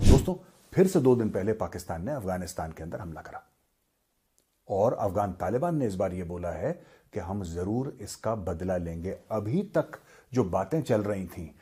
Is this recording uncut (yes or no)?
yes